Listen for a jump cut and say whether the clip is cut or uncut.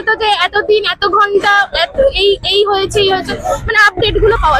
uncut